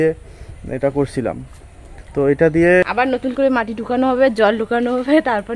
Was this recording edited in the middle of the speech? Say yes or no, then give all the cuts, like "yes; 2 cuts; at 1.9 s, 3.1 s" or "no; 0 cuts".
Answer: yes; 1 cut; at 2.8 s